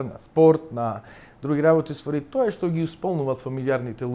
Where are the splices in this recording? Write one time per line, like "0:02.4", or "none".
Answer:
none